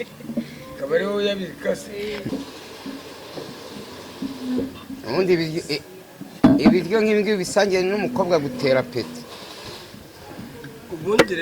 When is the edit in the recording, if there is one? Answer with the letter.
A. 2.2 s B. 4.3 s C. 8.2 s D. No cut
A